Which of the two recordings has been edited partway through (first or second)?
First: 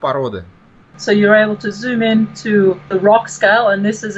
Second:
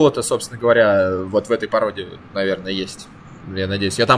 first